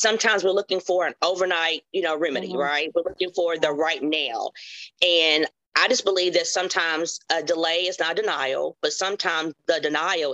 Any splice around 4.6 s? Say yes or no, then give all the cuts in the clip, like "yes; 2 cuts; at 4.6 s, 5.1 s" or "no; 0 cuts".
no; 0 cuts